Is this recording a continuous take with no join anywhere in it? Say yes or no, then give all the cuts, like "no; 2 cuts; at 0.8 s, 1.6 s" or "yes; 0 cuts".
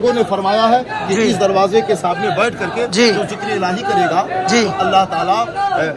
yes; 0 cuts